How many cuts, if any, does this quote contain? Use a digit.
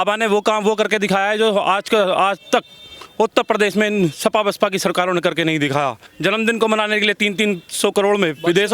1